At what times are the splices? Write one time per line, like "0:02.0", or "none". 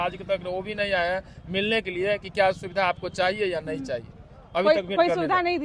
none